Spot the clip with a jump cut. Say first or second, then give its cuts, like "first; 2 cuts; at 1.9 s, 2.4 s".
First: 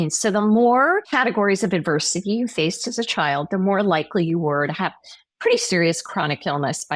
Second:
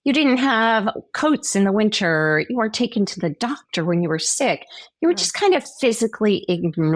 first; 1 cut; at 1.1 s